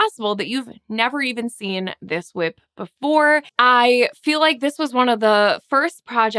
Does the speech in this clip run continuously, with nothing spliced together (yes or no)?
no